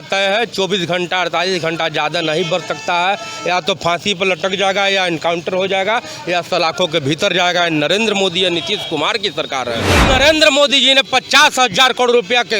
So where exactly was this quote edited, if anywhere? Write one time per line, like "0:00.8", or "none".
0:10.0